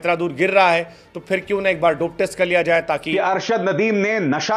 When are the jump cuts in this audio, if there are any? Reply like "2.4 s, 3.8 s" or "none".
3.1 s